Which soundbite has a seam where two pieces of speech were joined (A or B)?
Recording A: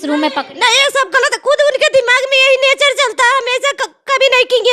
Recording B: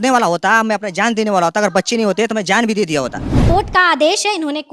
B